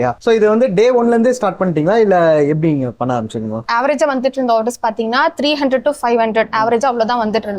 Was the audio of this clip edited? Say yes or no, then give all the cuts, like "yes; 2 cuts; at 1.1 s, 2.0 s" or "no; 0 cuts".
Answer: no; 0 cuts